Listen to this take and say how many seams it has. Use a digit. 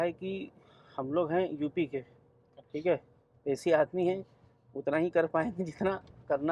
0